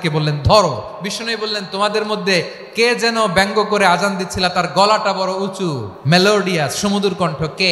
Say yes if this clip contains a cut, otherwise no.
yes